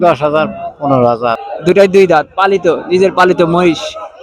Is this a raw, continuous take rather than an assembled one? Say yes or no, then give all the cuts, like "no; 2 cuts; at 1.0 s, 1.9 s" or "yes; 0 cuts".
no; 1 cut; at 1.5 s